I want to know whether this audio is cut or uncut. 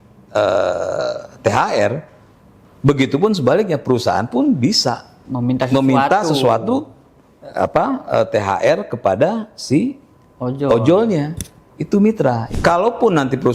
cut